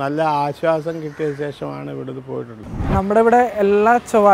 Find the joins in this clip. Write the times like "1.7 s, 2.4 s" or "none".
2.7 s

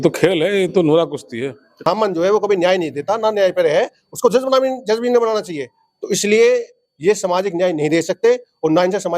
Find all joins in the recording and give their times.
1.9 s

